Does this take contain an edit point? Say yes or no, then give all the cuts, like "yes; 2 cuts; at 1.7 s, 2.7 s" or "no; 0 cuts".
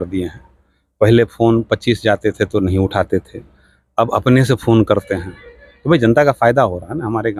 no; 0 cuts